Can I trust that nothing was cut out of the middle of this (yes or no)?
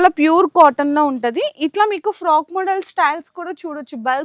yes